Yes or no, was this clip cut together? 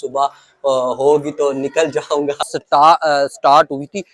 yes